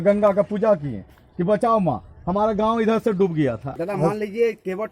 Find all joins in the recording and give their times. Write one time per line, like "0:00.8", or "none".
0:03.7